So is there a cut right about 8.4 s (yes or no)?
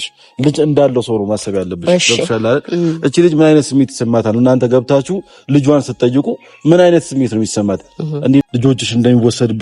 yes